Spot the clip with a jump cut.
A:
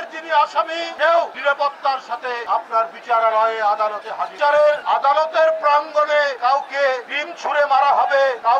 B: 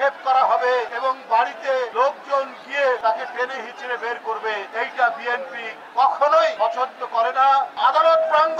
B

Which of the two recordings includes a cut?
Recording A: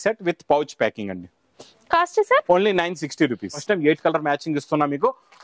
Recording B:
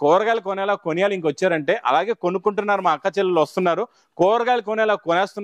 A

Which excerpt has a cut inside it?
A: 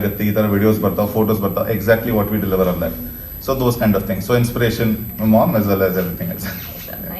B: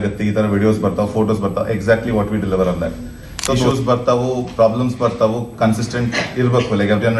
B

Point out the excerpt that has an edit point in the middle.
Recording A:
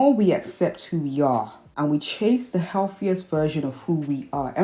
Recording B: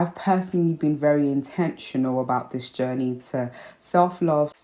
A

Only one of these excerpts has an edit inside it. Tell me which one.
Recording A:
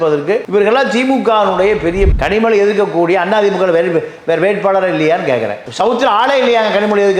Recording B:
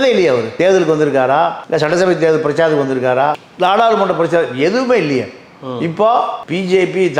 A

